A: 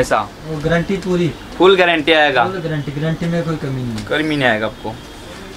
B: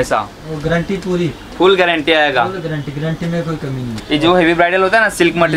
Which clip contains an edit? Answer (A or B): B